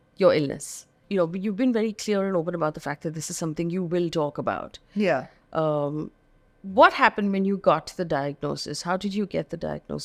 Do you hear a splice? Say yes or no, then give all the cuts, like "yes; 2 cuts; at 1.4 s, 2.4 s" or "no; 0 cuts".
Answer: no; 0 cuts